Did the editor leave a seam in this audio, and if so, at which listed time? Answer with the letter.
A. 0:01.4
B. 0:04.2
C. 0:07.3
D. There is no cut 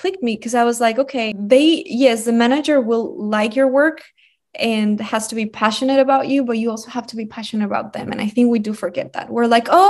A